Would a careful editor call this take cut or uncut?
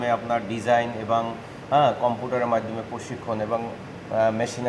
uncut